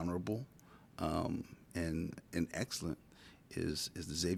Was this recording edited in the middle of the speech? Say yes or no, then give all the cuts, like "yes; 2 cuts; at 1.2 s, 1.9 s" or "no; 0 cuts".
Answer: no; 0 cuts